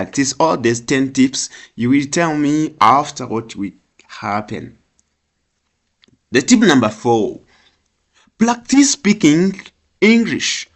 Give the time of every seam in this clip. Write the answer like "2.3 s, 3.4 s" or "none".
none